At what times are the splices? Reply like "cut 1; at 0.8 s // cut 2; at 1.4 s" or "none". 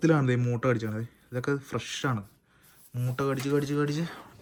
none